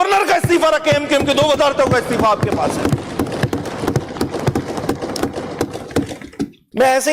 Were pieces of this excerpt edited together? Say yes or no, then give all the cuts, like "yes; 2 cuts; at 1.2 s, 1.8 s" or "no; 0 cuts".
no; 0 cuts